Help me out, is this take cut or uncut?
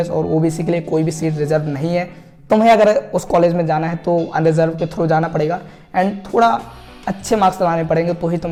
uncut